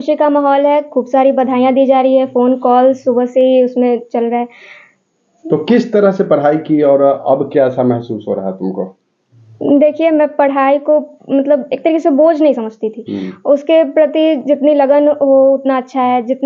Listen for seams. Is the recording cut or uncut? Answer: uncut